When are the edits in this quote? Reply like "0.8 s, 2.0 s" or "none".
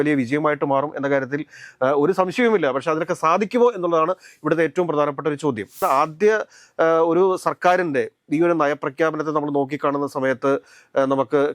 5.8 s